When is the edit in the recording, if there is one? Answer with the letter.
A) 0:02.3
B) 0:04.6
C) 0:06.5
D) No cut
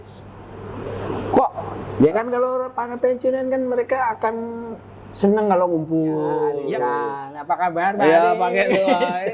C